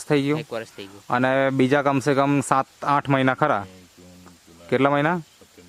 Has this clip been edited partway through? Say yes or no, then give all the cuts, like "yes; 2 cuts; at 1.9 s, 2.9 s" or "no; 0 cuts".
no; 0 cuts